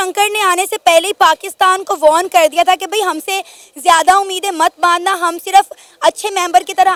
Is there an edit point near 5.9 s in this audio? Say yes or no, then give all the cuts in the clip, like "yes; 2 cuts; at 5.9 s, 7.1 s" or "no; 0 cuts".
no; 0 cuts